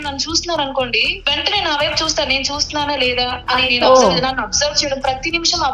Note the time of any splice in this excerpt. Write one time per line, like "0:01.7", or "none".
0:01.1